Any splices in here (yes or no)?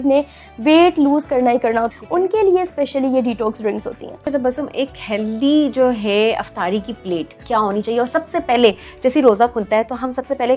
yes